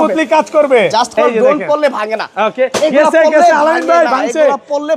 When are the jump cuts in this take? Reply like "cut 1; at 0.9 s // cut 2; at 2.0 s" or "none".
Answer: cut 1; at 1.1 s